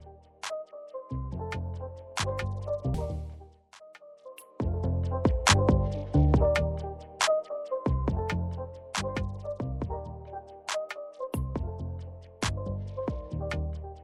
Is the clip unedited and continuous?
yes; 0 cuts

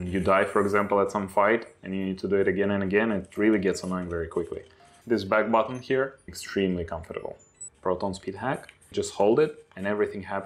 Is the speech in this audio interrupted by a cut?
yes; 3 cuts; at 6.3 s, 7.6 s, 8.9 s

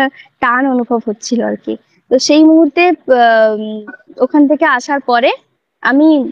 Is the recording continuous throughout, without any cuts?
yes; 0 cuts

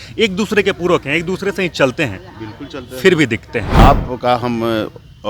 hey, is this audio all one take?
no; 1 cut; at 3.8 s

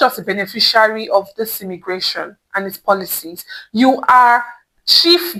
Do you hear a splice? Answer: no; 0 cuts

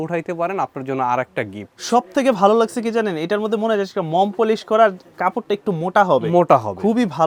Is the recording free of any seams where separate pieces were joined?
yes; 0 cuts

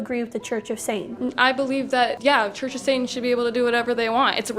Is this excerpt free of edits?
no; 2 cuts; at 1.1 s, 2.2 s

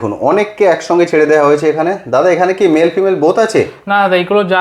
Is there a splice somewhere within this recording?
no; 0 cuts

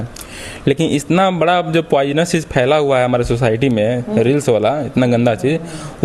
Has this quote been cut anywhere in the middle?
no; 0 cuts

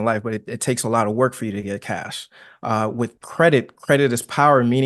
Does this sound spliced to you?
no; 0 cuts

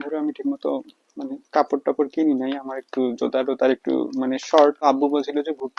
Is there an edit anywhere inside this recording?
yes; 1 cut; at 4.8 s

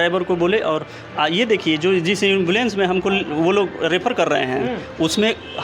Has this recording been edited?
no; 0 cuts

